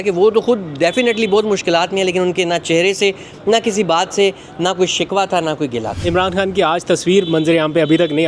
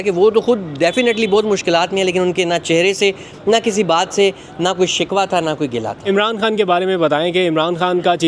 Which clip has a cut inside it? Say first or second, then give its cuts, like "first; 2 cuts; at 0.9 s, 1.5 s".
first; 1 cut; at 5.9 s